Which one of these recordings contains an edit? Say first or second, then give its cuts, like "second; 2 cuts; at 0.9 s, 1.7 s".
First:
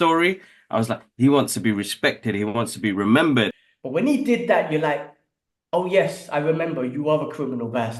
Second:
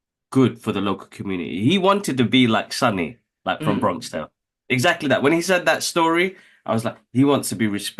first; 1 cut; at 3.5 s